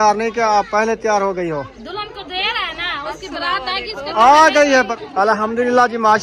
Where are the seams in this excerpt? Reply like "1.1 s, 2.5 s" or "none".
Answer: 4.9 s